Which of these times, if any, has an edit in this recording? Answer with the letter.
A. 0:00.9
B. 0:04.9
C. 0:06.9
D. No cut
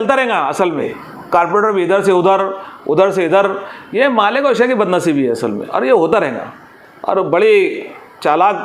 A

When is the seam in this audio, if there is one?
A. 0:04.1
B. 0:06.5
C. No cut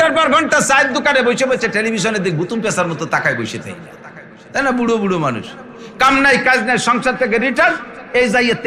C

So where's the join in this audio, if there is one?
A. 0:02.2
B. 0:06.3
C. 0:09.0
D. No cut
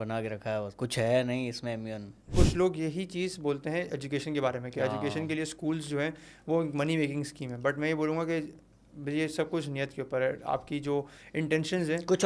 A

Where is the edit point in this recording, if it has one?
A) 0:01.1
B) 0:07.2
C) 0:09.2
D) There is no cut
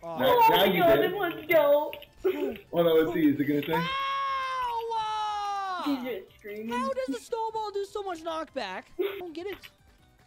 C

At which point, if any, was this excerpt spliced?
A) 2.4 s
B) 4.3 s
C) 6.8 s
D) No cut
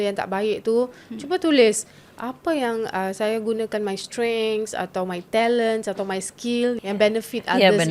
C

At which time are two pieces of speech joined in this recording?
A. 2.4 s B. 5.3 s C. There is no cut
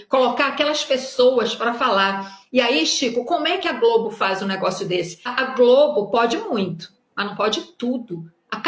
B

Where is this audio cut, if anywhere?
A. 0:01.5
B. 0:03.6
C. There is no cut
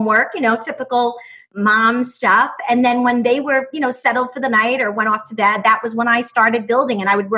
A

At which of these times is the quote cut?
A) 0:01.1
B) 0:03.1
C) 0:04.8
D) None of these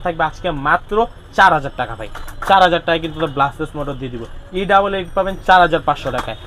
D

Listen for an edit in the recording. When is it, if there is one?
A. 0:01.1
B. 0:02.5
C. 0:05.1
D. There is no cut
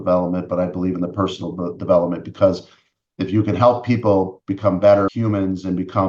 C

